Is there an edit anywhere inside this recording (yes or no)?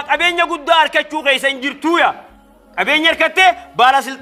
no